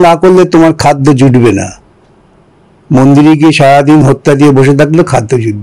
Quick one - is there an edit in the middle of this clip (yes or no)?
no